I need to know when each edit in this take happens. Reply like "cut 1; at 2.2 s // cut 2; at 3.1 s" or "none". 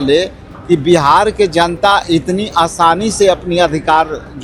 none